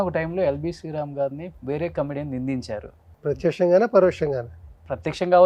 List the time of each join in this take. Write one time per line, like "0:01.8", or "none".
0:01.5
0:03.0